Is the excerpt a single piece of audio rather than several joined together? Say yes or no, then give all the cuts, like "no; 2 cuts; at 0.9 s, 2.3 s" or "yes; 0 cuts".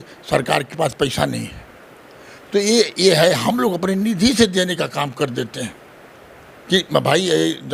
yes; 0 cuts